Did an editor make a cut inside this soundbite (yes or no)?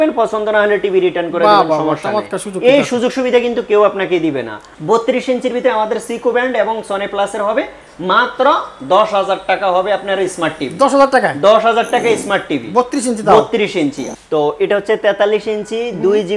yes